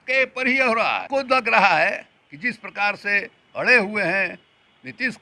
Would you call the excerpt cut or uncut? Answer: cut